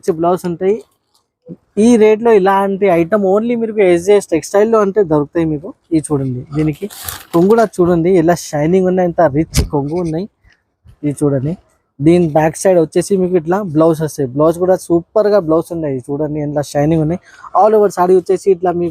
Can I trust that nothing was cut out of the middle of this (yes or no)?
yes